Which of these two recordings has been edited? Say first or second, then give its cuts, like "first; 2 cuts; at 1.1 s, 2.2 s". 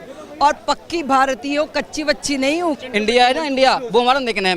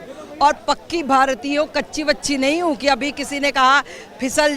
first; 1 cut; at 2.8 s